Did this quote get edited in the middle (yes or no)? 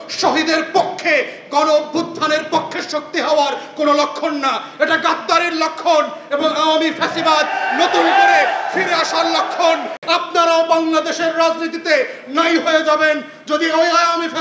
yes